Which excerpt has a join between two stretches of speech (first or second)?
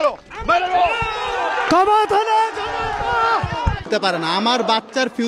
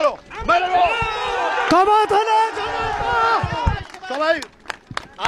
first